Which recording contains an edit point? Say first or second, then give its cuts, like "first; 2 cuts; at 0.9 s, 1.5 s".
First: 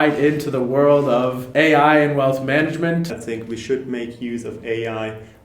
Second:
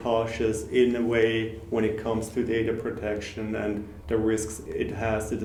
first; 2 cuts; at 1.4 s, 3.2 s